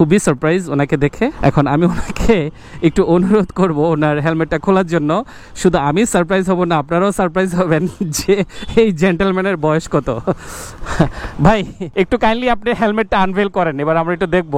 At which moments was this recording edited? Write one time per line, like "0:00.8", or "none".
0:11.8